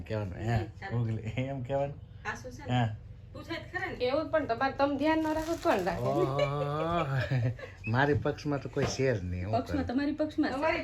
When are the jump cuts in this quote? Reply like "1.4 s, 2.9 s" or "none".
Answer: none